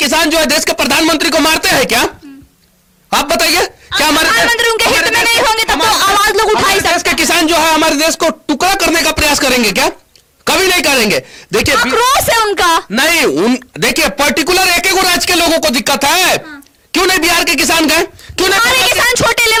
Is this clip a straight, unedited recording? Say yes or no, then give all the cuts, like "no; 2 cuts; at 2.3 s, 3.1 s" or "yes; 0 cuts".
yes; 0 cuts